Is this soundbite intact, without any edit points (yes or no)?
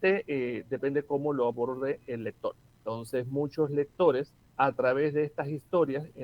no